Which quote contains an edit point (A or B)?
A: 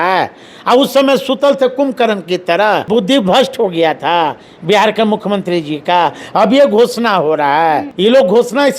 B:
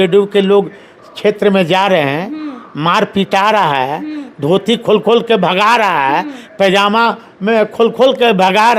A